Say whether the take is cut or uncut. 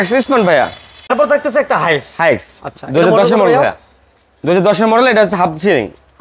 cut